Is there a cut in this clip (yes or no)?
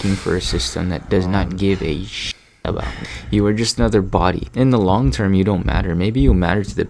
yes